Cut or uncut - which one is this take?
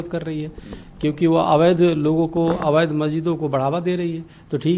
uncut